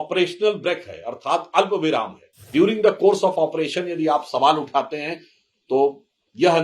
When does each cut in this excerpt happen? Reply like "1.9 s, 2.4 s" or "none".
2.5 s